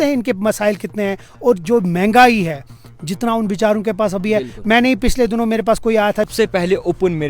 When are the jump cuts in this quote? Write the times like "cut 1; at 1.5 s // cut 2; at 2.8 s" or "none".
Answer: cut 1; at 6.3 s